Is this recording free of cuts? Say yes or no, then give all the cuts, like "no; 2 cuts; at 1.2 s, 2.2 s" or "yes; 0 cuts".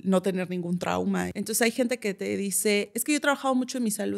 no; 2 cuts; at 1.3 s, 3.0 s